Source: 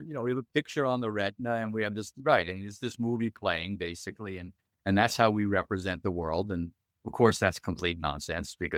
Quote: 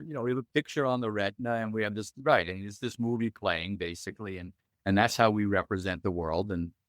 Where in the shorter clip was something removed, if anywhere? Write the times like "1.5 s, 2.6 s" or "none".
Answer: none

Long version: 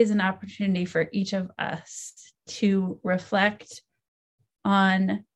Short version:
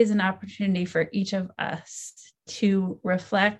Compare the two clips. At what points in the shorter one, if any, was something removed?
none

